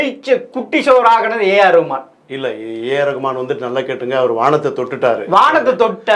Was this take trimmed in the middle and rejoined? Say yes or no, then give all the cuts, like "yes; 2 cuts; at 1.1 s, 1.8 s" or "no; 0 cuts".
no; 0 cuts